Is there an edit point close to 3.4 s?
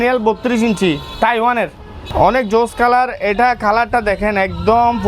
no; 1 cut; at 2.1 s

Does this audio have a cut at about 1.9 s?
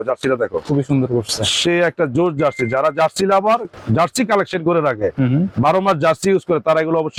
no; 0 cuts

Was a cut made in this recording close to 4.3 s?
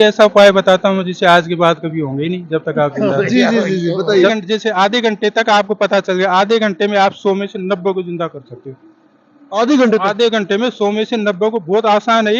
yes; 1 cut; at 4.3 s

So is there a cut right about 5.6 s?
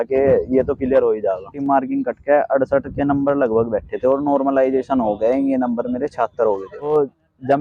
no; 2 cuts; at 1.6 s, 6.9 s

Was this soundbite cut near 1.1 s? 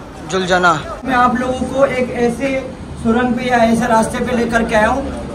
yes; 1 cut; at 1.1 s

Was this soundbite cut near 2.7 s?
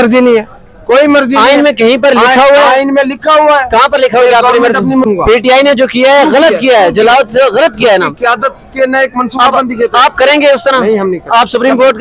no; 1 cut; at 5.1 s

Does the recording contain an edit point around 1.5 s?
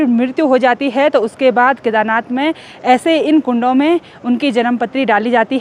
no; 0 cuts

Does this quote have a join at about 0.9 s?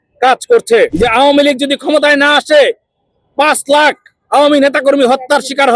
yes; 1 cut; at 0.9 s

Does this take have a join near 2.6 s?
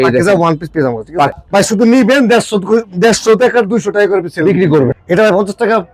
no; 2 cuts; at 1.3 s, 4.9 s

